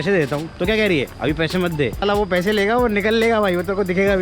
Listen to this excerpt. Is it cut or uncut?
cut